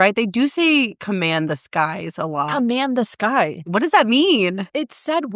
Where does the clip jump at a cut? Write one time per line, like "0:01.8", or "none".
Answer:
0:03.7